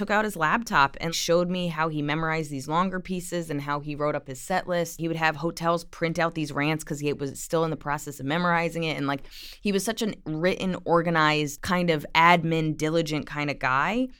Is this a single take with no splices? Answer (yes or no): no